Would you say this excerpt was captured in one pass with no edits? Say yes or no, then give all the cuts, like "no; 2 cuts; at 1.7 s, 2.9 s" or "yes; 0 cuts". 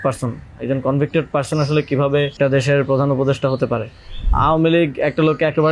no; 2 cuts; at 2.3 s, 4.3 s